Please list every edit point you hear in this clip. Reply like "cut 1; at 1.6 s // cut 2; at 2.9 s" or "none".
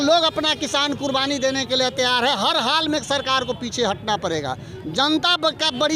none

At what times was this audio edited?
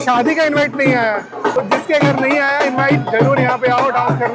cut 1; at 1.5 s

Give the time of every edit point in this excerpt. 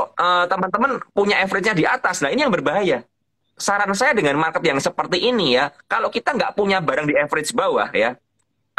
cut 1; at 3.4 s

